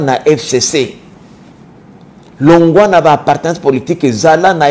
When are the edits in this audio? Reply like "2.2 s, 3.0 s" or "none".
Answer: none